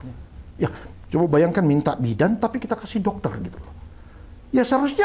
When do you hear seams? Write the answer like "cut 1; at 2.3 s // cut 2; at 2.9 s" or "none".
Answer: none